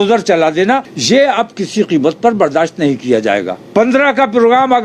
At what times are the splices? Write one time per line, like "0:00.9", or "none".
0:00.9
0:03.6

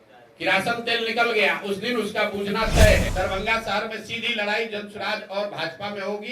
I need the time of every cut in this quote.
0:03.1

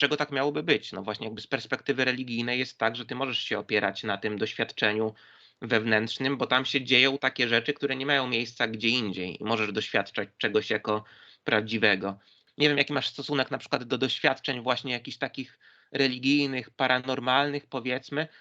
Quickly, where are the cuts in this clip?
0:12.4

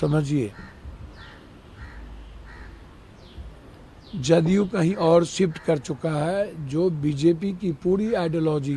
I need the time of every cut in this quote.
none

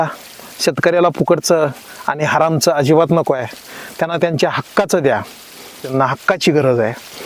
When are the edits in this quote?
none

